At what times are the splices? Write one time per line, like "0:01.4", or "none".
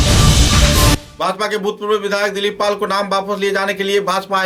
none